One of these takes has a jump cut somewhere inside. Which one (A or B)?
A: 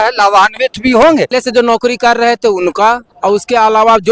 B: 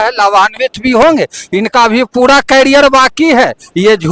A